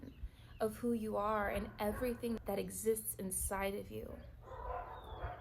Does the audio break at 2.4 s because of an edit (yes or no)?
yes